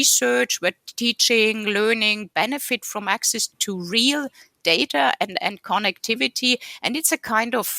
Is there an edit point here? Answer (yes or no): yes